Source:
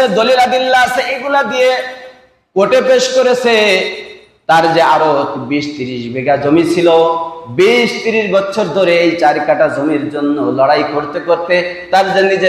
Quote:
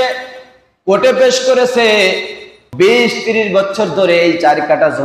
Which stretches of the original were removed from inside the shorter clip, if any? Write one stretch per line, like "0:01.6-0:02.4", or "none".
0:04.3-0:07.4